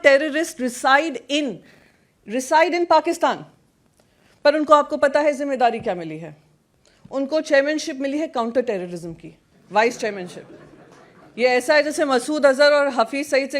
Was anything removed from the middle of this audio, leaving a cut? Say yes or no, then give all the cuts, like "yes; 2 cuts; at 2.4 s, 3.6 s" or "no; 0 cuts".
no; 0 cuts